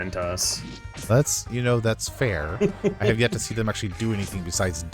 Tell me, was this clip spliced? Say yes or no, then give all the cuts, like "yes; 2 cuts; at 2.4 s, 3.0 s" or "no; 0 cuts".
no; 0 cuts